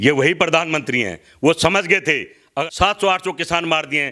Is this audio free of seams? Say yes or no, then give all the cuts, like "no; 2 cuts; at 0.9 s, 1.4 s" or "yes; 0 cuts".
no; 1 cut; at 2.7 s